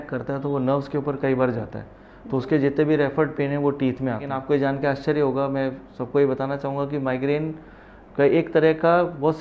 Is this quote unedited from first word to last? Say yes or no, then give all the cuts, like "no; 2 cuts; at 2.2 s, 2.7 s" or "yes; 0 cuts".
no; 1 cut; at 4.3 s